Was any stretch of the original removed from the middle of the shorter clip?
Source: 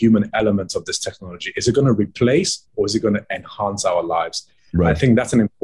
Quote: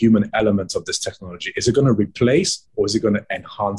no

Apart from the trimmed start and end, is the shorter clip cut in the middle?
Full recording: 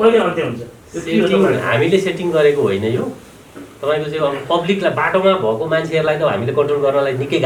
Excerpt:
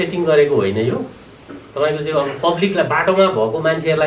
no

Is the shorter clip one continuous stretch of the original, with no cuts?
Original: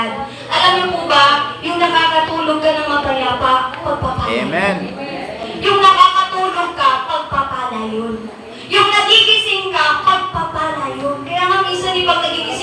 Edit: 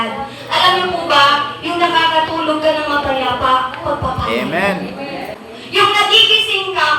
no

